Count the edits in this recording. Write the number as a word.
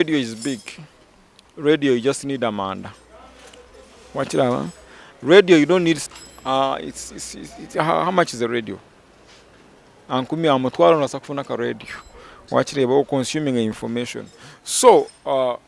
zero